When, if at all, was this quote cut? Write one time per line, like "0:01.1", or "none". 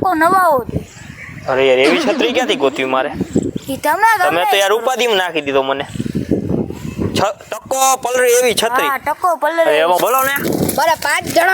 0:10.0